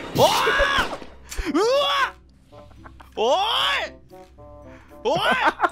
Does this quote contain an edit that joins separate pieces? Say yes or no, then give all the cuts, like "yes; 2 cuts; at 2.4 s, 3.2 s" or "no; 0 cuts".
no; 0 cuts